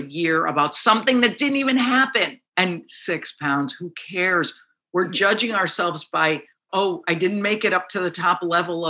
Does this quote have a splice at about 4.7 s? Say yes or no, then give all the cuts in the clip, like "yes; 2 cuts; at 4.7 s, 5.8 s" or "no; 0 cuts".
no; 1 cut; at 2.4 s